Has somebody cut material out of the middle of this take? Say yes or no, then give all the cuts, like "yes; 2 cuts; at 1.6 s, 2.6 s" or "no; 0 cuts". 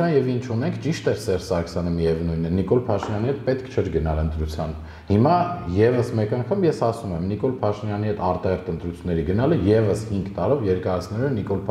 no; 0 cuts